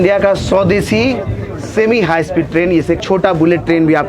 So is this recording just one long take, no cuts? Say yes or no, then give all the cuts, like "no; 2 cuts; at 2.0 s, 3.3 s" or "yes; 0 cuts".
no; 1 cut; at 3.0 s